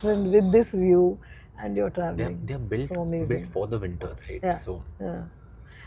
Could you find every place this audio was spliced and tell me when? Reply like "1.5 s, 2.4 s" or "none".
none